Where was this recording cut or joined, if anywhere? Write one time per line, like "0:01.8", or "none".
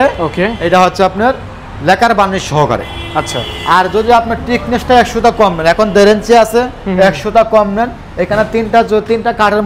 none